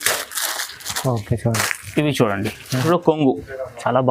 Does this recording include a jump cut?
yes; 1 cut; at 2.8 s

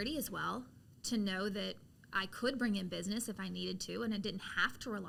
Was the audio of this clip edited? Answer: no; 0 cuts

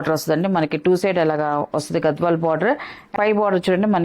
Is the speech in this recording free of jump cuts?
no; 1 cut; at 3.0 s

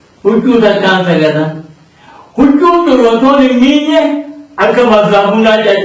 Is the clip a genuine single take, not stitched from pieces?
yes; 0 cuts

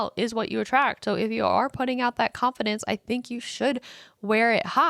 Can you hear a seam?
no; 0 cuts

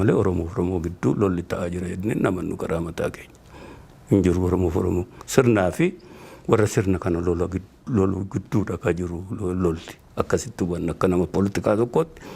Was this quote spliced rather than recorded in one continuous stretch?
no; 0 cuts

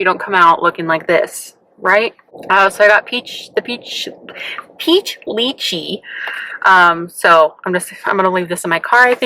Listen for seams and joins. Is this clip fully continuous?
yes; 0 cuts

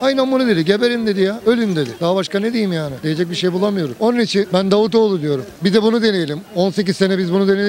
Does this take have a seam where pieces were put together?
no; 0 cuts

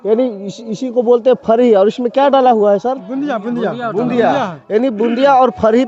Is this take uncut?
yes; 0 cuts

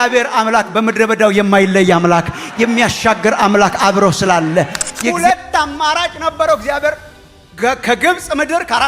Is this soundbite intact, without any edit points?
no; 1 cut; at 5.1 s

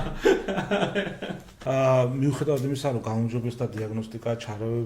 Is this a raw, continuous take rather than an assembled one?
no; 1 cut; at 1.5 s

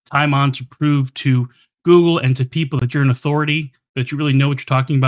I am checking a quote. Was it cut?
no; 0 cuts

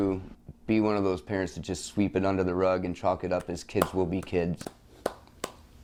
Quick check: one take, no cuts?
yes; 0 cuts

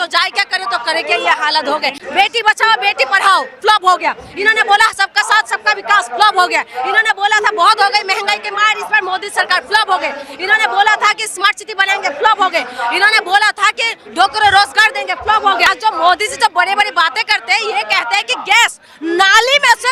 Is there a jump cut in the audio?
yes; 2 cuts; at 2.0 s, 15.7 s

